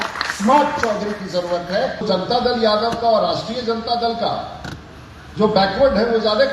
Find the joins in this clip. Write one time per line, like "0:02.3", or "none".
0:02.0

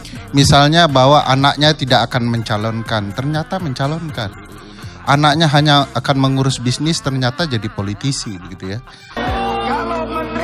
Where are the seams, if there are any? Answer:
0:09.2

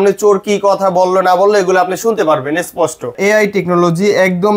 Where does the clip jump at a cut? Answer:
0:03.2

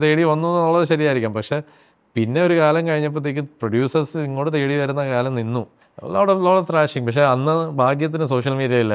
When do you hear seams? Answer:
0:06.0

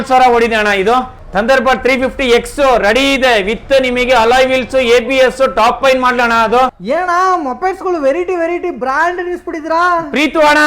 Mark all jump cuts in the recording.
0:01.2
0:06.8

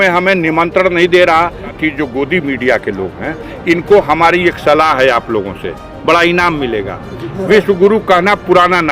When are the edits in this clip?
0:01.8

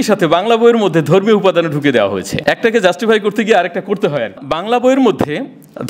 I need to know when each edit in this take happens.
0:02.3
0:04.4

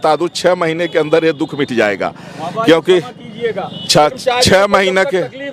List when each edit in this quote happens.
none

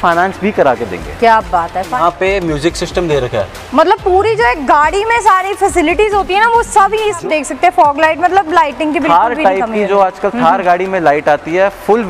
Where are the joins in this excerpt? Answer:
0:01.9
0:07.2

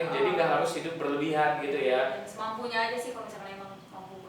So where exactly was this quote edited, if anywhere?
none

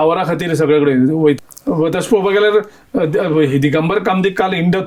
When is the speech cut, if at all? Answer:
0:01.4

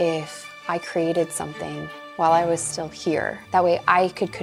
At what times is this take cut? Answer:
0:03.4

